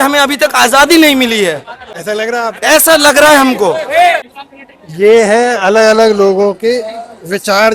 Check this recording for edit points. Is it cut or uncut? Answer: uncut